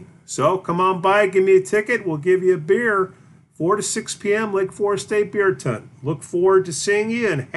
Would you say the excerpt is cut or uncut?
uncut